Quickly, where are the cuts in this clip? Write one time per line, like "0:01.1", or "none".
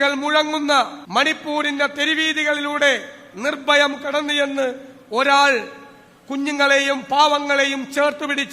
0:01.0